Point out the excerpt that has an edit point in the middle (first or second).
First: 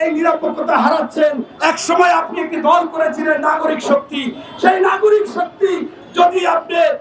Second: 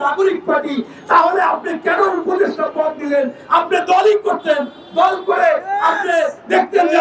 first